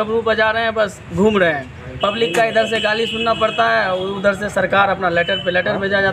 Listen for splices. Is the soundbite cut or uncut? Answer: uncut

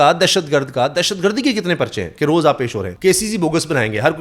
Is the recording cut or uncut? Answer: cut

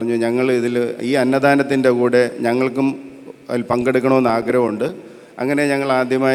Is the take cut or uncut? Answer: uncut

